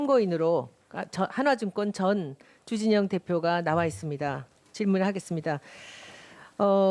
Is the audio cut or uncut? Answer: cut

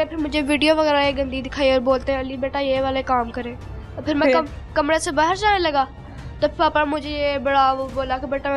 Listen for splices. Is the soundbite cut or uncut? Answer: uncut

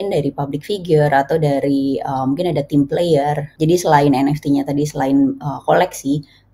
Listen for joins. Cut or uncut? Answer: cut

